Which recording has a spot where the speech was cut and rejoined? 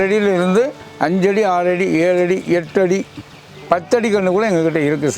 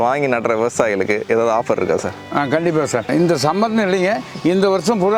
first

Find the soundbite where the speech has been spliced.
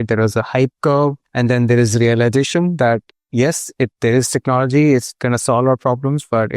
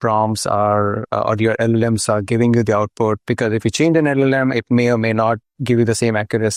first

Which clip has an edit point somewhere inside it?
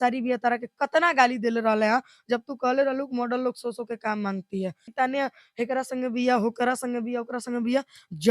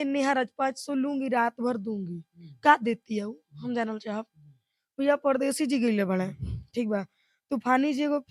first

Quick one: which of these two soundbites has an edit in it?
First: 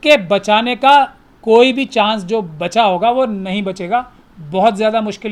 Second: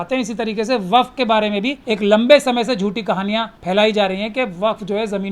second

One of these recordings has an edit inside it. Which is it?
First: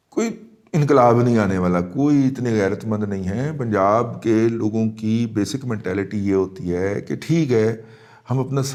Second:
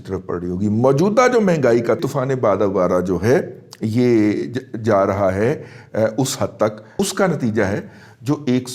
second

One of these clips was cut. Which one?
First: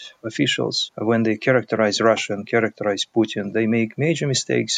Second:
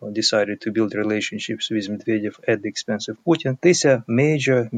second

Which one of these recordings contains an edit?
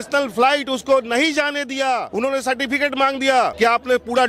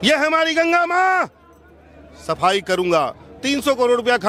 first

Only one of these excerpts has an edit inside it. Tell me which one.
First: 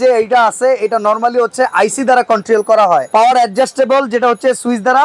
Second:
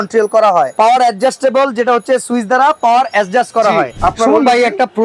second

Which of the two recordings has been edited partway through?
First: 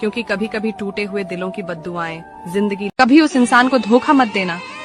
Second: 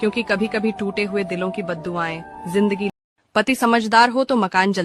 first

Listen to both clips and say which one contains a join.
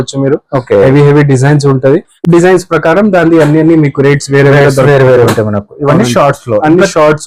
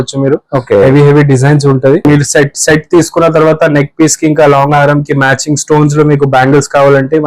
second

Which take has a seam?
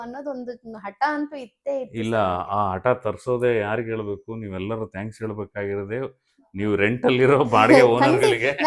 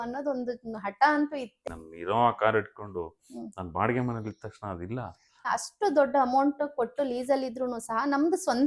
second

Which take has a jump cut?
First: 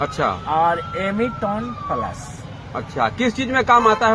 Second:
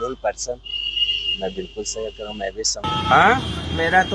second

